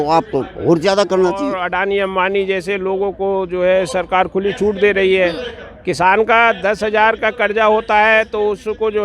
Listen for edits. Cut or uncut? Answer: cut